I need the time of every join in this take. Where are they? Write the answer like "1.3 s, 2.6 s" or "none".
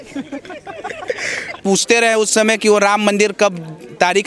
1.2 s